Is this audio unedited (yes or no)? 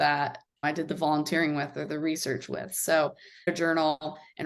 no